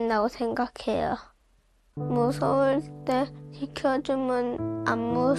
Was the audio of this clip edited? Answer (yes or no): yes